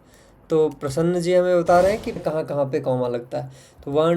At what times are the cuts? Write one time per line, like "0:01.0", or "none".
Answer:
0:02.2